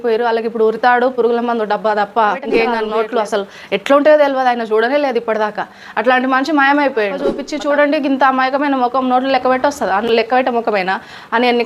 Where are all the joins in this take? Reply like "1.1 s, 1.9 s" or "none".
2.8 s, 7.5 s